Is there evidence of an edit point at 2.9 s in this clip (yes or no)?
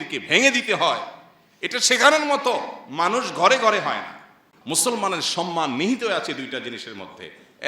no